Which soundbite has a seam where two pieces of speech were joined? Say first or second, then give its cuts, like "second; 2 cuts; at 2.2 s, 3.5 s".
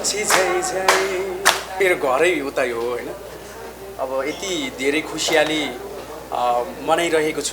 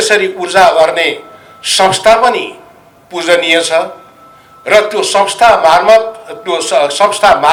first; 1 cut; at 1.7 s